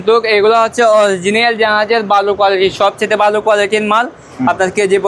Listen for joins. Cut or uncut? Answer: uncut